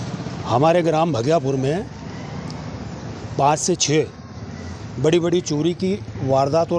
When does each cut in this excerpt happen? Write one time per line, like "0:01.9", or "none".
none